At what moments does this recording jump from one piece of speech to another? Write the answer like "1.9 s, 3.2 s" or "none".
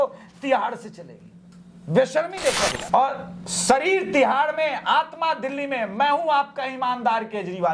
2.8 s